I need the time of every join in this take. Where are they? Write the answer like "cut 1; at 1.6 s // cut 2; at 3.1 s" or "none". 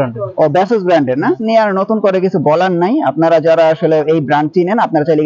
cut 1; at 1.4 s